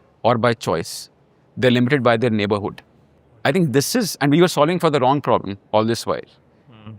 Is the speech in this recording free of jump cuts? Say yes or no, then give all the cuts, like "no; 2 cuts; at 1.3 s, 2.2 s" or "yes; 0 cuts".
yes; 0 cuts